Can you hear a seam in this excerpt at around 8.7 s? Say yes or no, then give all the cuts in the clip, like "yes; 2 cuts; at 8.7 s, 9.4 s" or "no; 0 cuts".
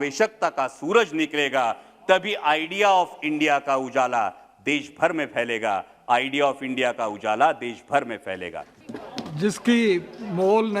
yes; 1 cut; at 8.7 s